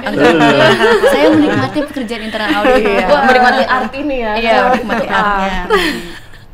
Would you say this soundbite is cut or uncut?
uncut